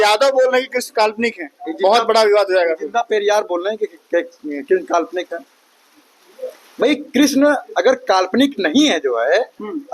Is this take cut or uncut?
uncut